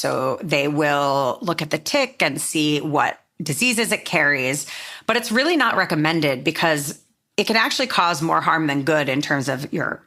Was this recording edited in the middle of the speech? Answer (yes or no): no